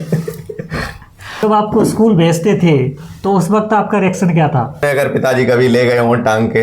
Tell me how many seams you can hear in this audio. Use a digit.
2